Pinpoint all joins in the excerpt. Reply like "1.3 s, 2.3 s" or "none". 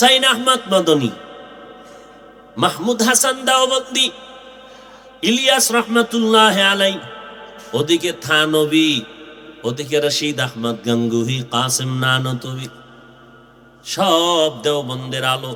none